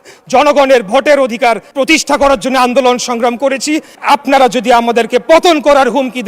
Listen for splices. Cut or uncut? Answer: cut